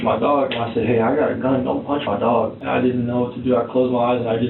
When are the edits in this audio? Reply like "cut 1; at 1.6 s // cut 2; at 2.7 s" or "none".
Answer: cut 1; at 2.6 s